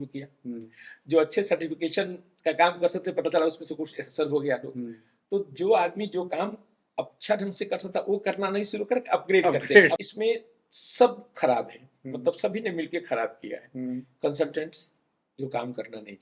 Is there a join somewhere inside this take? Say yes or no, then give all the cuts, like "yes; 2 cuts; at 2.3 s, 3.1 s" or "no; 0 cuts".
yes; 1 cut; at 10.0 s